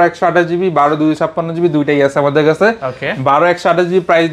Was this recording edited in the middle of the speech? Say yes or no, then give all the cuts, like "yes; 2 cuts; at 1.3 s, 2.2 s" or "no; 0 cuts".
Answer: no; 0 cuts